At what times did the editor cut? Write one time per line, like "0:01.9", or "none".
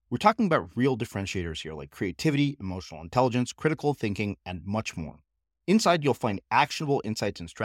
none